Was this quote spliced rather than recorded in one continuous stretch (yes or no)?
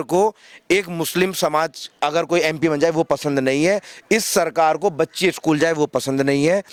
no